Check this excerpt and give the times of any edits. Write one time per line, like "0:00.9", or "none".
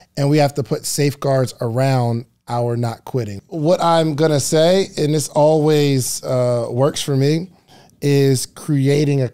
0:03.4